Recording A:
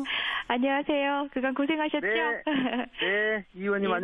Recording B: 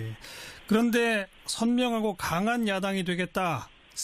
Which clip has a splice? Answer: B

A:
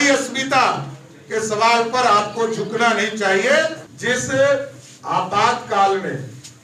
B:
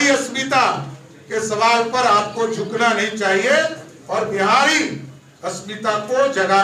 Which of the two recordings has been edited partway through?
A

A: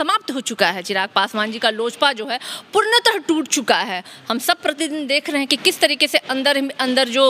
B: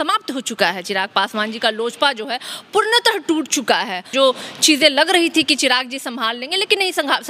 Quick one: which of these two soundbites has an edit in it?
B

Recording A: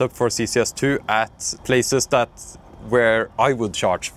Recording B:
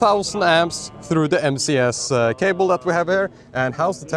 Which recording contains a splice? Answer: A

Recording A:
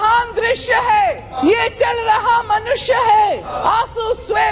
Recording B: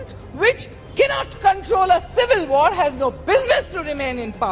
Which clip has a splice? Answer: A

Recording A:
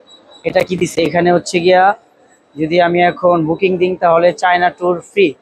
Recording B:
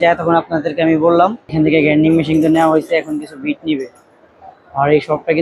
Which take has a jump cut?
B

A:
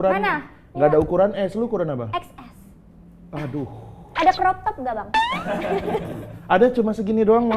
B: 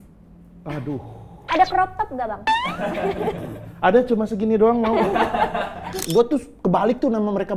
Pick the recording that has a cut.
B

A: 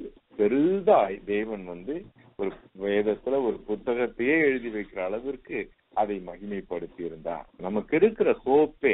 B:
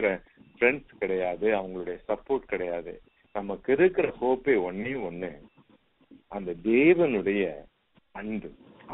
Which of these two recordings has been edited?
A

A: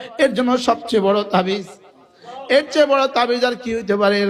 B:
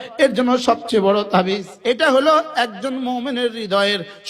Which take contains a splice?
B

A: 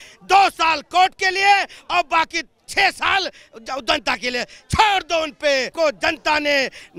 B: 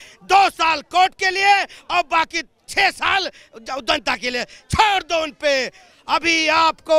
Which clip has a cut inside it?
A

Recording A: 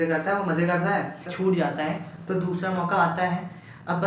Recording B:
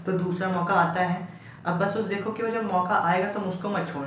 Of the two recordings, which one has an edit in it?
A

